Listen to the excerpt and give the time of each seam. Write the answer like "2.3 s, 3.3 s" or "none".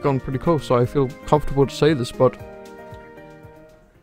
none

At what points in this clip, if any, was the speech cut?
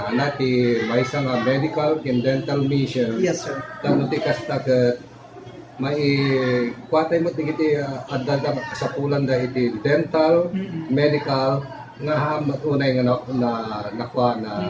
none

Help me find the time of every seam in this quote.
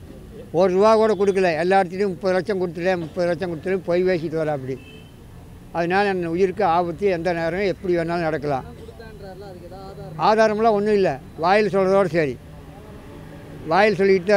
none

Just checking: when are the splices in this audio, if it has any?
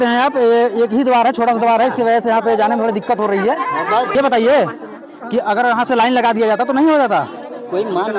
4.1 s

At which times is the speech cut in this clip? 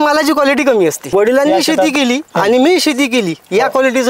1.1 s

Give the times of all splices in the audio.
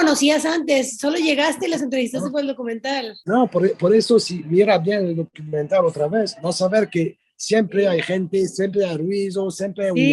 3.1 s

